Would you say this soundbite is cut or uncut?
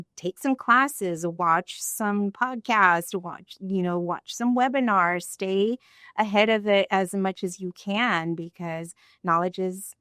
uncut